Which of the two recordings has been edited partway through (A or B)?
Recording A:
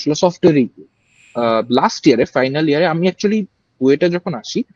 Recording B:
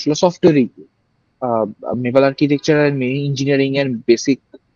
A